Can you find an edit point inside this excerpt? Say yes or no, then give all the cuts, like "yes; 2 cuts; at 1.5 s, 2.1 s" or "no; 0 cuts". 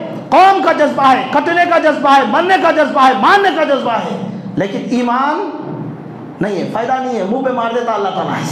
no; 0 cuts